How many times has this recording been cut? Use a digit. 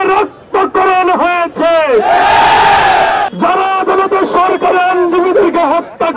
1